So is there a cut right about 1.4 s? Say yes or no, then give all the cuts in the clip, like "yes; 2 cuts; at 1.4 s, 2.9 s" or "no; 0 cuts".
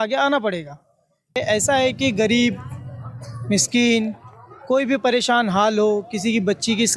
yes; 1 cut; at 1.4 s